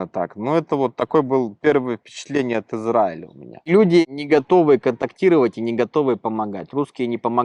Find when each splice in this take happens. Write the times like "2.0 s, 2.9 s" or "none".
3.5 s